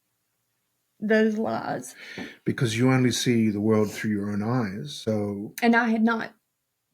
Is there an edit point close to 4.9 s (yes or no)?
yes